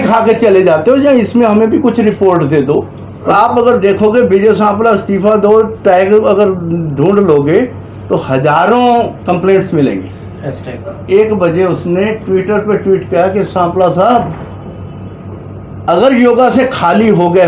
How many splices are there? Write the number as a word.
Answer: two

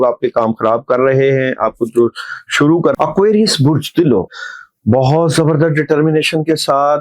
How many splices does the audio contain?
two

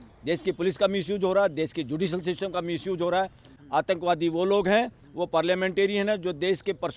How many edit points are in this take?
one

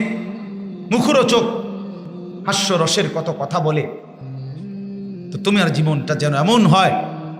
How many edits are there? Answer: zero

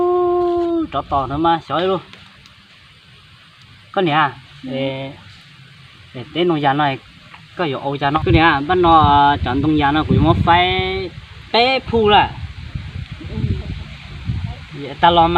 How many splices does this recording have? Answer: one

